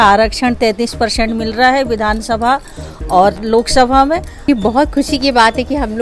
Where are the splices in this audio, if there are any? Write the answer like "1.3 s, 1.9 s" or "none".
4.5 s